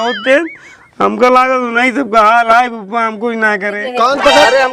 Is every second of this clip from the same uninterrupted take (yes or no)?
no